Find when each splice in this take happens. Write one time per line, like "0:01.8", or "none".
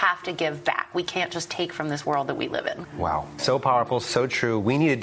none